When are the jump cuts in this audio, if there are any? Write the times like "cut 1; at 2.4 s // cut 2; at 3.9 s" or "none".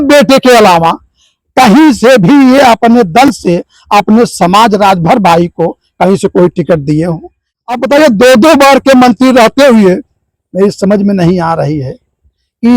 cut 1; at 7.4 s